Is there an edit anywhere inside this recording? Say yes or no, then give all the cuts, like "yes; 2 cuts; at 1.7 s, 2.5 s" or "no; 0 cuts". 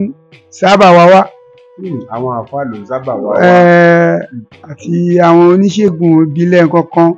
no; 0 cuts